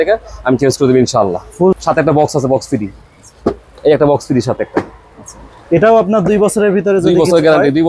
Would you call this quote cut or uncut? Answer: cut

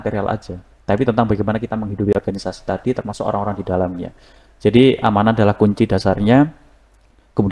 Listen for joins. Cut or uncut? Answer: uncut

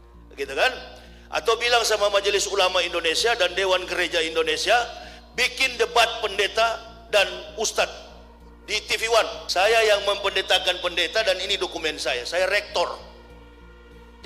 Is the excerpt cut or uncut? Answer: cut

